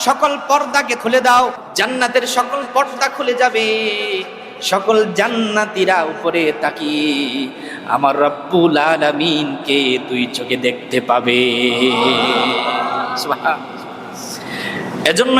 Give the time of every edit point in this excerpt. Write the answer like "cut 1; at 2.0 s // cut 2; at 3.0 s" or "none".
cut 1; at 1.0 s // cut 2; at 1.6 s